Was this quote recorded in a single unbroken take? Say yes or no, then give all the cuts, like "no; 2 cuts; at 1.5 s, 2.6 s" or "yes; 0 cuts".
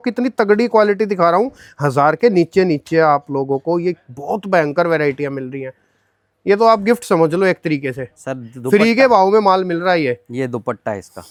yes; 0 cuts